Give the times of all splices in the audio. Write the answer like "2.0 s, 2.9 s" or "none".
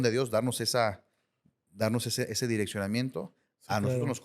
none

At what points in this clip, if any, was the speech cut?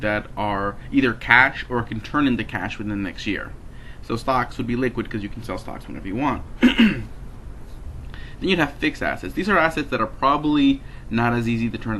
none

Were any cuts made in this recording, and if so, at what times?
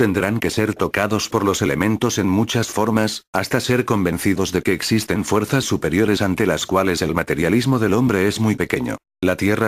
2.7 s

